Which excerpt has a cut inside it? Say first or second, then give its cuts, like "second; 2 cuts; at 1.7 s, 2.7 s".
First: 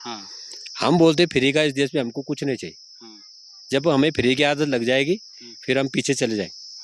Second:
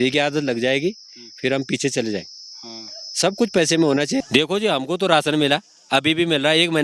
second; 1 cut; at 4.2 s